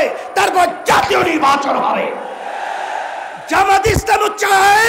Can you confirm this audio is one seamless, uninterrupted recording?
yes; 0 cuts

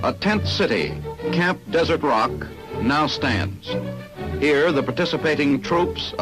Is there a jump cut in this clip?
yes; 1 cut; at 4.3 s

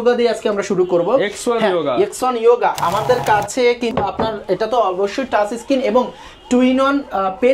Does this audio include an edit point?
yes; 1 cut; at 3.9 s

